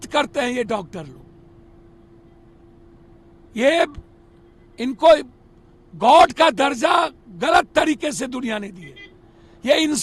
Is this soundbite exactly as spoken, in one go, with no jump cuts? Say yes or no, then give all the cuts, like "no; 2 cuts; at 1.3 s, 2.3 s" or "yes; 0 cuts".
yes; 0 cuts